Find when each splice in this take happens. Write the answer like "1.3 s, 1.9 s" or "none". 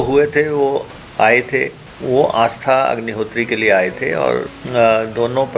1.0 s, 1.9 s, 4.6 s